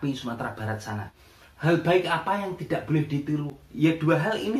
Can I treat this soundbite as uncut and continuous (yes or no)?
no